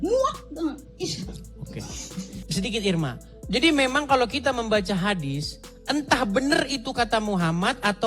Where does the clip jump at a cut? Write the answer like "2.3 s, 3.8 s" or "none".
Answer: 2.4 s